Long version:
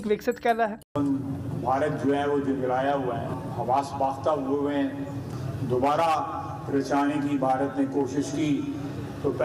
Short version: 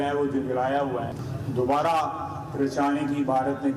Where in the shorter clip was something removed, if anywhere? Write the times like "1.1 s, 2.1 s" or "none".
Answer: 1.2 s